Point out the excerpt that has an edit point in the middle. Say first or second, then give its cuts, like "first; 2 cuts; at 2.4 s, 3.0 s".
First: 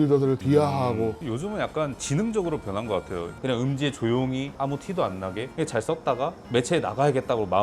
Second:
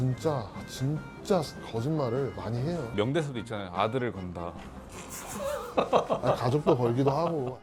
first; 3 cuts; at 1.2 s, 4.5 s, 5.5 s